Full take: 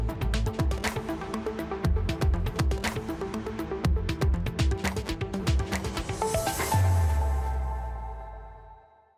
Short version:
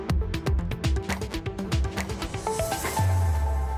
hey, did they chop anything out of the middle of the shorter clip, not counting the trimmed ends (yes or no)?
no